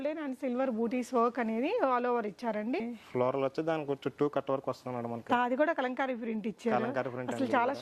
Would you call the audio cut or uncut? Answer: cut